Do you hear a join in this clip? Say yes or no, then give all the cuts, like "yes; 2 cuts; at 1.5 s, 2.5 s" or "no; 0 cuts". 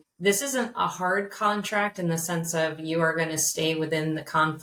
no; 0 cuts